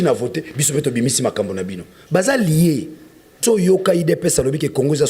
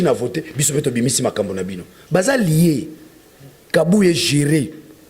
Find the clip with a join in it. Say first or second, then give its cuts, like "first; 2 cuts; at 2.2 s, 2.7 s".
first; 1 cut; at 3.4 s